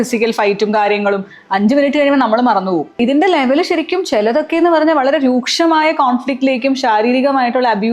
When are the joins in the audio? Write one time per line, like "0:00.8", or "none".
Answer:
0:03.0